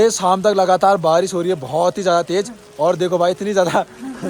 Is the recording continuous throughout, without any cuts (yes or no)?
yes